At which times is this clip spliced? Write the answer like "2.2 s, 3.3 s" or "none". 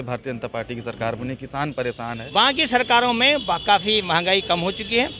2.2 s